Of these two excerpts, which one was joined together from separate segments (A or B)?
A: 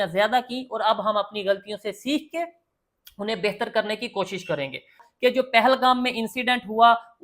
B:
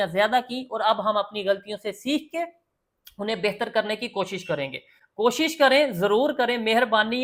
A